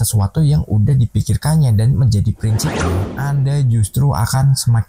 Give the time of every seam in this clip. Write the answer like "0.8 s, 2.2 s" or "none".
3.0 s